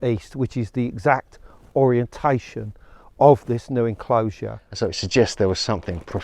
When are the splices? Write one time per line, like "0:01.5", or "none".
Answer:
0:04.6